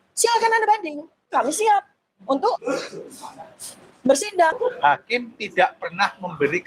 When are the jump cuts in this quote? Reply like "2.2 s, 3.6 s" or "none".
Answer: 4.6 s